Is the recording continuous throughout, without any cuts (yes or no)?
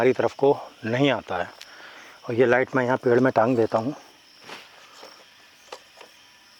yes